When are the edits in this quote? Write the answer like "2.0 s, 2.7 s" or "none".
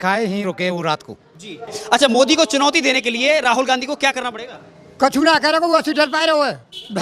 1.7 s